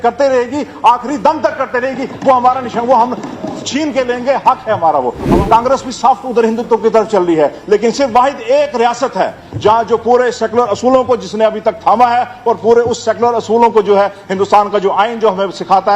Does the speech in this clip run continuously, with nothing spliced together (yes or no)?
no